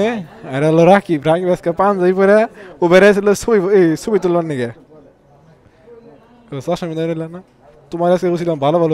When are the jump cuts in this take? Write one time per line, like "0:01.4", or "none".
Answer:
none